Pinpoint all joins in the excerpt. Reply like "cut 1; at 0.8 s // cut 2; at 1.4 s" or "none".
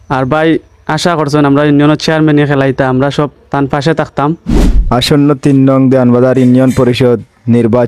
cut 1; at 4.4 s